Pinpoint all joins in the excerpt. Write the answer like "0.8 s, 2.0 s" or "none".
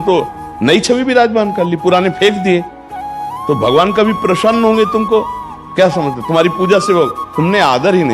none